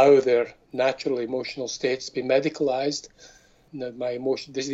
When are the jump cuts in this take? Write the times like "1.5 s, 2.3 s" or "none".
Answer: 3.7 s

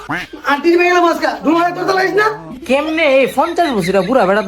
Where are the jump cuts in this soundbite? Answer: 2.6 s

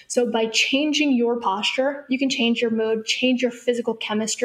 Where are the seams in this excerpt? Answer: 2.3 s

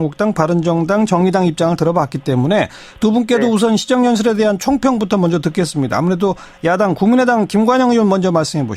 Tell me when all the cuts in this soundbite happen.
2.8 s

